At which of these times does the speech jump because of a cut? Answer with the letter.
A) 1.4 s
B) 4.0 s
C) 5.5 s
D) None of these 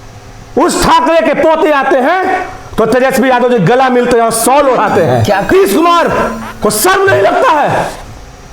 C